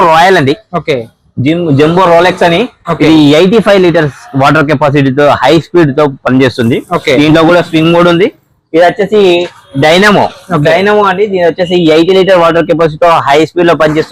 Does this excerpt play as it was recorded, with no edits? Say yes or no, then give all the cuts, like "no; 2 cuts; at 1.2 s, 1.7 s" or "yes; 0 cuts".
yes; 0 cuts